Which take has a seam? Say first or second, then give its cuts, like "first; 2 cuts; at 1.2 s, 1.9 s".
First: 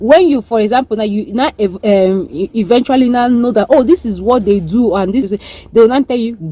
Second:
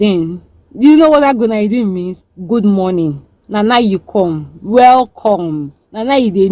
first; 1 cut; at 5.3 s